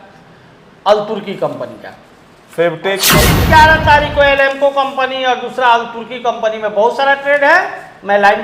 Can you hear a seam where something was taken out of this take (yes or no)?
yes